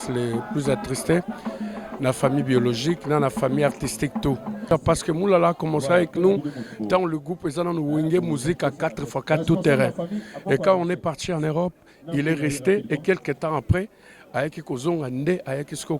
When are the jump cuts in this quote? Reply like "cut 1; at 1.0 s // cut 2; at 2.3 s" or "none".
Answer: cut 1; at 4.7 s